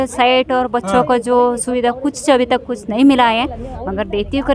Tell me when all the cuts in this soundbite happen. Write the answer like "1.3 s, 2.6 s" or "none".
none